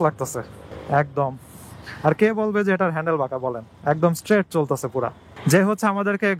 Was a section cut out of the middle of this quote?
yes; 1 cut; at 5.3 s

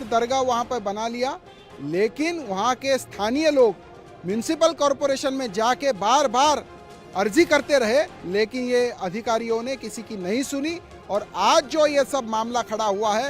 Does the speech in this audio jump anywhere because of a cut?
no; 0 cuts

